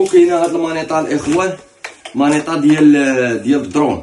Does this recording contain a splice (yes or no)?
no